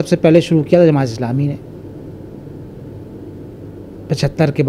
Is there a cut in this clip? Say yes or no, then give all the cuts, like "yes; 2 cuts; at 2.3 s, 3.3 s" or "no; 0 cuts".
no; 0 cuts